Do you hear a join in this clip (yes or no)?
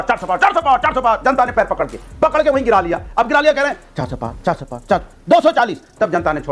no